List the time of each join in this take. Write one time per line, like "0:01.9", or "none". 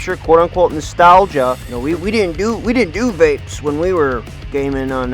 0:01.7